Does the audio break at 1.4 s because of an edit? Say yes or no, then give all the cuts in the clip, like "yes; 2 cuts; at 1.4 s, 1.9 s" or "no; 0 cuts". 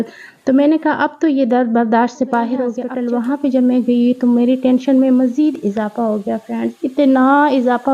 no; 1 cut; at 2.9 s